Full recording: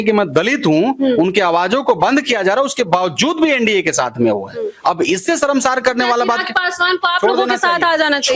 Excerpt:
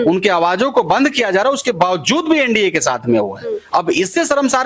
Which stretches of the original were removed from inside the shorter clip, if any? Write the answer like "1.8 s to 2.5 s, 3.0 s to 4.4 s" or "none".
none